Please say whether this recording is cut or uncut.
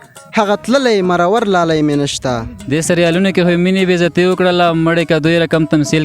cut